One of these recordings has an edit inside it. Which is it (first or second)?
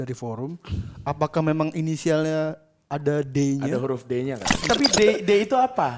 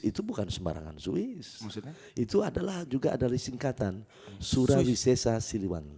first